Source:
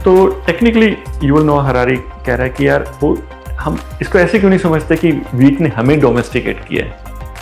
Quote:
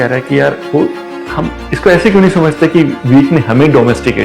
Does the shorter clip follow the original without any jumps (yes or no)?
yes